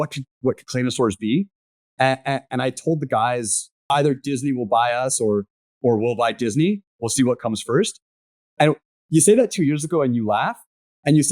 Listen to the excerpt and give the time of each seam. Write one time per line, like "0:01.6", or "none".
0:03.9